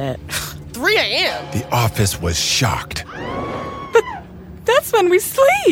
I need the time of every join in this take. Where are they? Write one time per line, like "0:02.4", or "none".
none